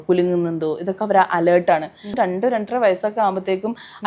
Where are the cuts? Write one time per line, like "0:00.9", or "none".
0:02.1